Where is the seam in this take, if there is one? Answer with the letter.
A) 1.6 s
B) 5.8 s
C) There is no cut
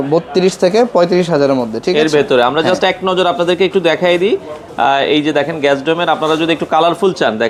C